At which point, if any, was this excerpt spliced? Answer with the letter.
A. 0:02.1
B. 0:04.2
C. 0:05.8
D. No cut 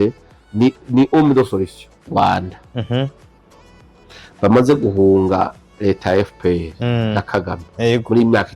A